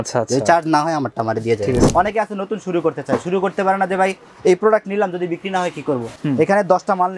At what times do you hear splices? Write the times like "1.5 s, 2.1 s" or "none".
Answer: 1.8 s, 6.1 s